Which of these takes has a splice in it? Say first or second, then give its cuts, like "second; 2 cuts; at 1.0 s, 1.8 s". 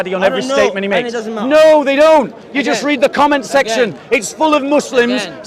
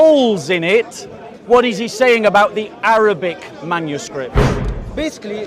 second; 1 cut; at 4.5 s